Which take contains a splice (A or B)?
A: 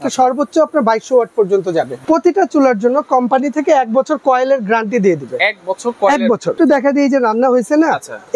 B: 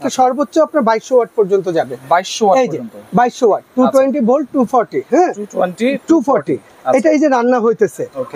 A